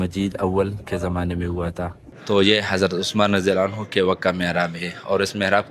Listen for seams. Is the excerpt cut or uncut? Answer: cut